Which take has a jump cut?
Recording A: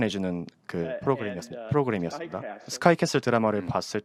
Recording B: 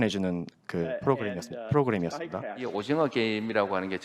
B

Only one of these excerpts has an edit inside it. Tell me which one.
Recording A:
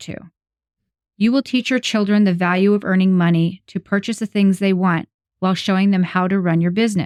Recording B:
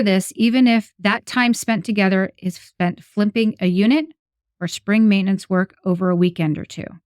B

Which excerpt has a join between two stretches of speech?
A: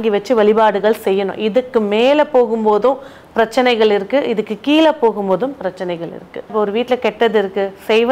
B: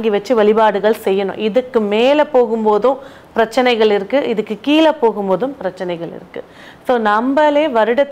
A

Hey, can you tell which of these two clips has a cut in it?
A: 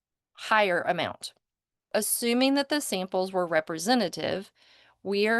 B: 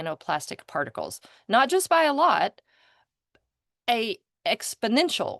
A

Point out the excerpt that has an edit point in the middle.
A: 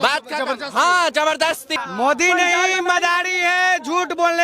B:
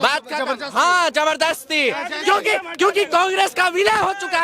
A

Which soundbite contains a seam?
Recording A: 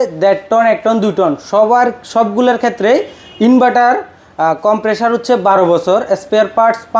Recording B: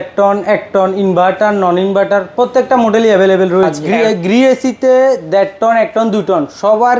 B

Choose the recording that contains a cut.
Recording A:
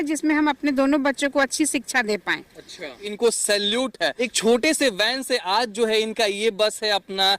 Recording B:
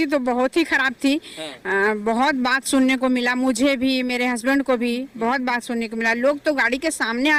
A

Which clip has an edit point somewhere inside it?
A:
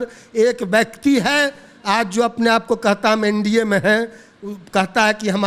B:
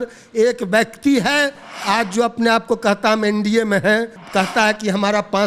B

